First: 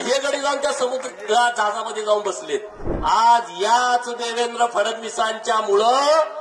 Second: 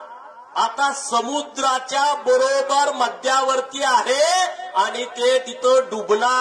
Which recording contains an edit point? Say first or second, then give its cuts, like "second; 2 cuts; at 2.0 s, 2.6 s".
first; 1 cut; at 2.9 s